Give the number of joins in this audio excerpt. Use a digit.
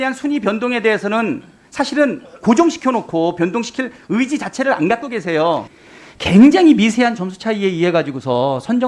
1